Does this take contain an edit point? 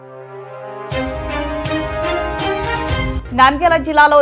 no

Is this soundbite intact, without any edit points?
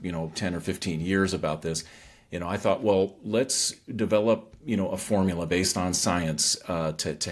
yes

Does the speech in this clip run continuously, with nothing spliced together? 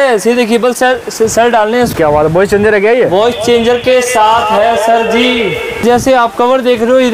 no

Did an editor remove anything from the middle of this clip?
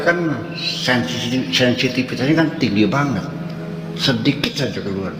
no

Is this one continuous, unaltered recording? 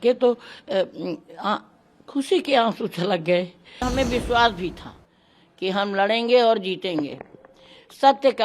no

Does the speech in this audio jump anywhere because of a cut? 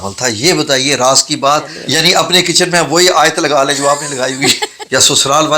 yes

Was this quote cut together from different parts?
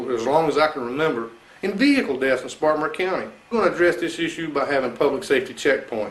yes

